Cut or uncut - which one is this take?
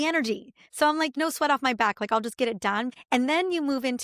cut